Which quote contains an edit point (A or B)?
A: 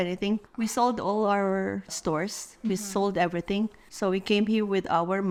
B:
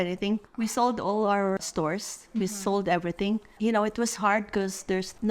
B